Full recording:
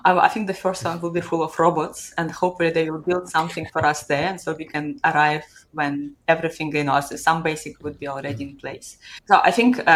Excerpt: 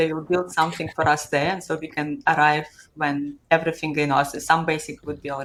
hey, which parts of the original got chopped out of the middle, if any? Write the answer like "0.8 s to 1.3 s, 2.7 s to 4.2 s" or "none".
none